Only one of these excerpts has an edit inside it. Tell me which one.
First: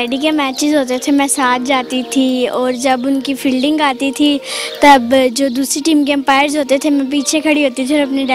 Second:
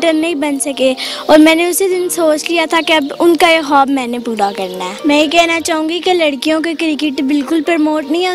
second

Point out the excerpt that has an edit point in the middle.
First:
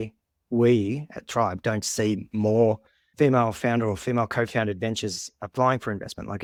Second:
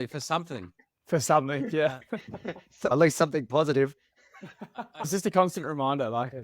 second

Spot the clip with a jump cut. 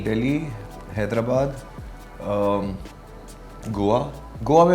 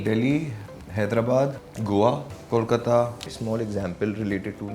second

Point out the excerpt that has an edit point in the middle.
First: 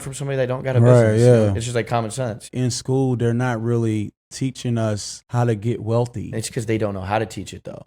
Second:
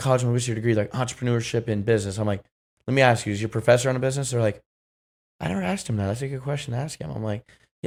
first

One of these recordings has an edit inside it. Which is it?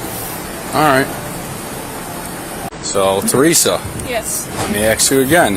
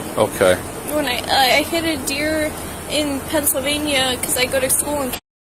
first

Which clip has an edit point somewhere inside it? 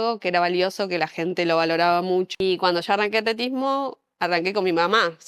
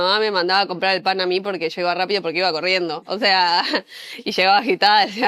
first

